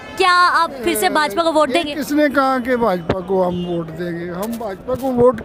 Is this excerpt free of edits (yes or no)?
yes